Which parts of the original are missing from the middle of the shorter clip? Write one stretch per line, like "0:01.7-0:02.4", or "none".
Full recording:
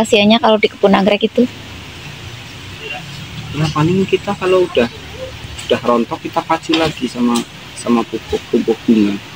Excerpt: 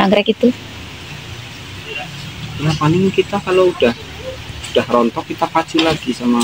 none

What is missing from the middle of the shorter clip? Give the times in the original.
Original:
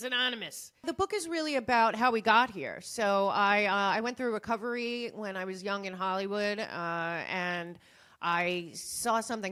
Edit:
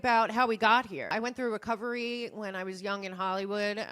0:02.8-0:04.0

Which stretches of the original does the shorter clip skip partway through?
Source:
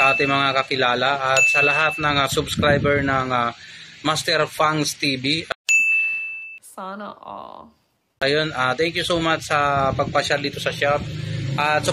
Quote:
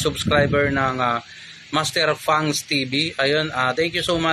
0:05.5-0:08.1

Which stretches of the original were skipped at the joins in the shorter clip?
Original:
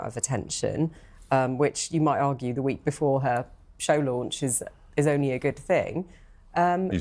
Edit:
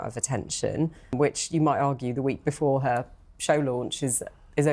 0:01.1-0:01.5

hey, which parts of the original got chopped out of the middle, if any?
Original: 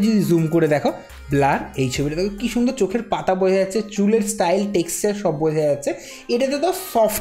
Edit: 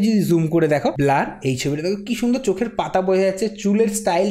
0:00.9-0:01.3

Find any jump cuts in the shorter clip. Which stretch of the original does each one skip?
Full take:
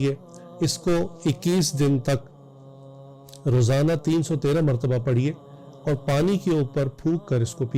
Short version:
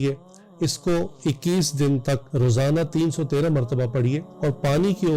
0:02.2-0:03.4
0:05.4-0:05.7

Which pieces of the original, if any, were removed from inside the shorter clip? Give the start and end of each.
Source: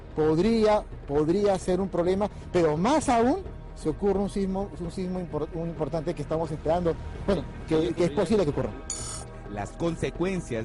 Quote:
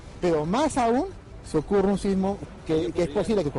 0:04.8-0:07.5

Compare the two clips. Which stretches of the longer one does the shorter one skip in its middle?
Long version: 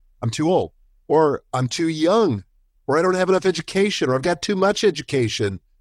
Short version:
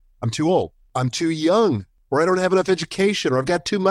0:00.9-0:01.5
0:02.5-0:02.7

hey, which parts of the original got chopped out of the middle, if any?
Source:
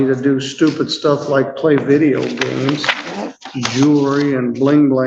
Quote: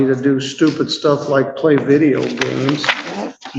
none

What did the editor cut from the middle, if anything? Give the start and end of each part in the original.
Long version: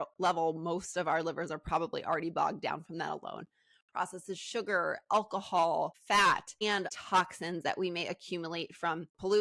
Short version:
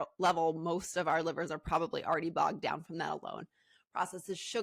none

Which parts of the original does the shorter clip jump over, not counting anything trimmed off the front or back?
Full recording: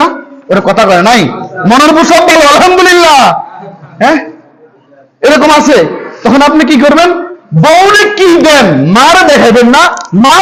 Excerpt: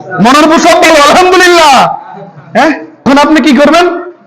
0:04.5-0:06.3

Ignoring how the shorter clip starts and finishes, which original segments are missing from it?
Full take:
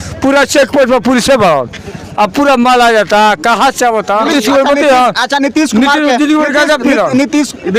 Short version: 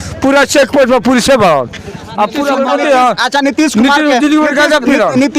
0:02.5-0:04.5

